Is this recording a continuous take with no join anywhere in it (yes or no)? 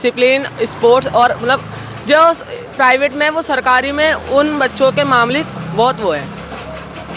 yes